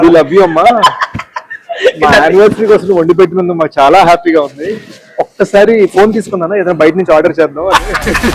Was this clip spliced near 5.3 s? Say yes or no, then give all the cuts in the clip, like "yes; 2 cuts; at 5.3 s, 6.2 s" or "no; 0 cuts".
no; 0 cuts